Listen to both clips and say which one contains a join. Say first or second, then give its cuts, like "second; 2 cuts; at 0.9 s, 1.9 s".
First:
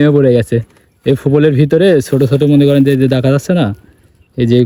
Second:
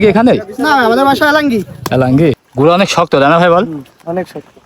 second; 1 cut; at 2.5 s